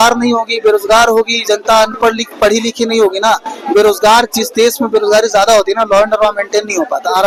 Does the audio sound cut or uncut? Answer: uncut